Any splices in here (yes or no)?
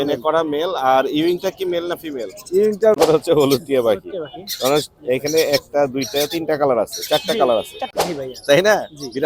yes